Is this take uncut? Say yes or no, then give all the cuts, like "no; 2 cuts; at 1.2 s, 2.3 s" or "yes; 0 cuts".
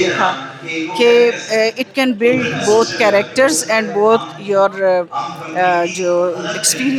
yes; 0 cuts